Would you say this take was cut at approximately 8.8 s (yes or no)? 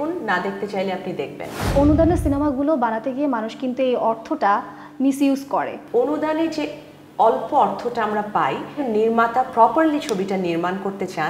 yes